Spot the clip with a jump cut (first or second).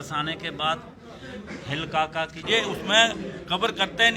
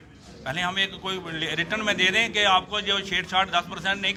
first